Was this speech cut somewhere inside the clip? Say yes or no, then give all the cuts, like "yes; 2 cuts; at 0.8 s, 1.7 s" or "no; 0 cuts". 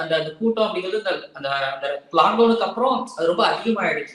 no; 0 cuts